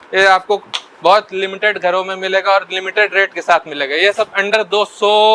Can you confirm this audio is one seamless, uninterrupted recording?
yes; 0 cuts

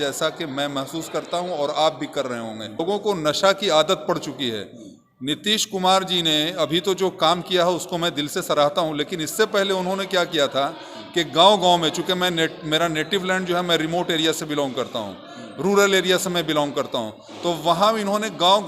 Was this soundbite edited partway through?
yes; 1 cut; at 2.8 s

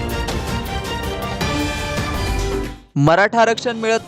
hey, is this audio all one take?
no; 1 cut; at 2.7 s

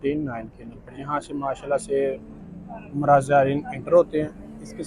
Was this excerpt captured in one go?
yes; 0 cuts

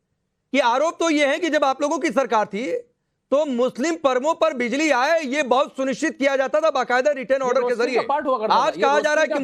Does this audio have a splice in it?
no; 0 cuts

